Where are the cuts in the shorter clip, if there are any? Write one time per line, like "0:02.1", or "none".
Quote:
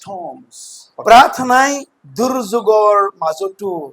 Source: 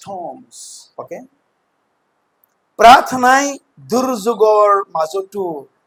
0:01.0